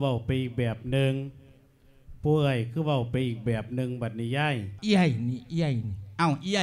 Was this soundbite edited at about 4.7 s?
yes; 1 cut; at 4.7 s

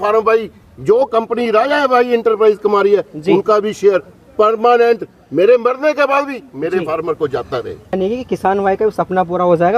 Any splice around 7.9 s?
yes; 1 cut; at 7.9 s

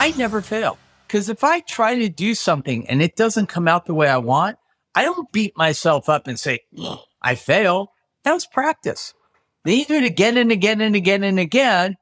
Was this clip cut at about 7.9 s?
no; 1 cut; at 0.9 s

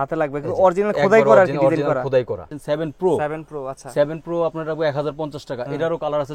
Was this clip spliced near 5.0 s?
no; 1 cut; at 2.5 s

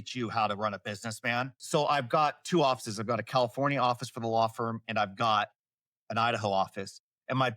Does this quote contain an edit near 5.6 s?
no; 1 cut; at 1.6 s

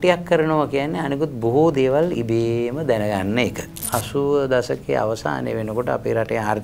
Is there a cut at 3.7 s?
yes; 1 cut; at 3.7 s

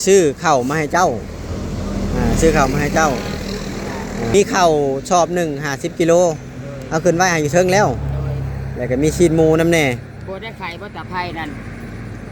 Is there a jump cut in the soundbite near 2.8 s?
no; 1 cut; at 4.3 s

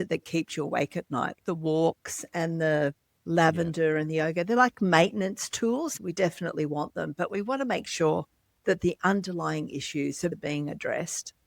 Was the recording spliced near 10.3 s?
yes; 3 cuts; at 1.4 s, 5.9 s, 10.3 s

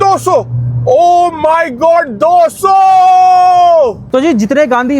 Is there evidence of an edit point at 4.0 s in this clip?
yes; 1 cut; at 4.0 s

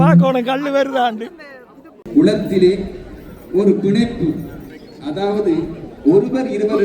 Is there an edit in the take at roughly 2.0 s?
yes; 1 cut; at 2.0 s

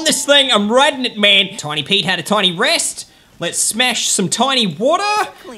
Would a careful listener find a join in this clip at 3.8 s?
no; 1 cut; at 1.6 s

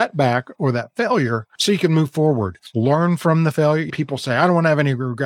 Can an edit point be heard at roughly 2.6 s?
yes; 3 cuts; at 1.5 s, 2.6 s, 3.9 s

